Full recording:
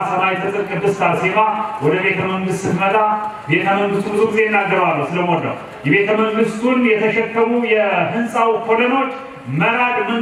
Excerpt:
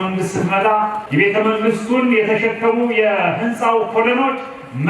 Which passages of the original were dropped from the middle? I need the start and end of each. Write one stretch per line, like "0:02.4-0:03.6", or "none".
0:03.3-0:05.7